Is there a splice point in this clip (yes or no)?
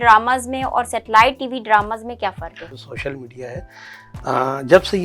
yes